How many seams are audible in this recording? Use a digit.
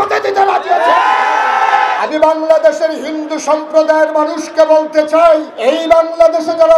2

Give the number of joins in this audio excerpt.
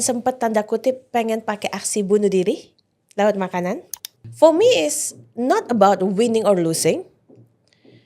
1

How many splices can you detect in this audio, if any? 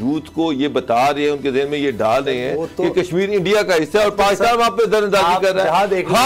0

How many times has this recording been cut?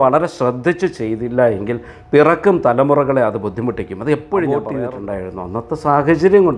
1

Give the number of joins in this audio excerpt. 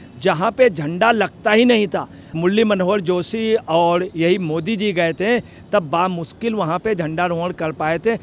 0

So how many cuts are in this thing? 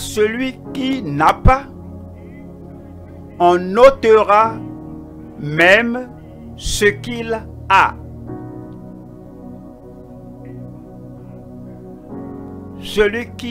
4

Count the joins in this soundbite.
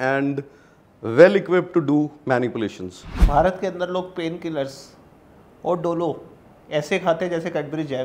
1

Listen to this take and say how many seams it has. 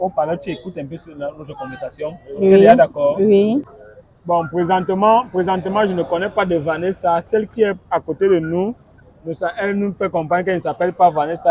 1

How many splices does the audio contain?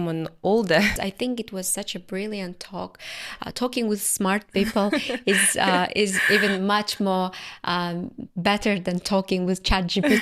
1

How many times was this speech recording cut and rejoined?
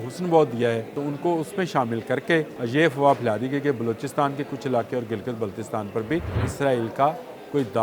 3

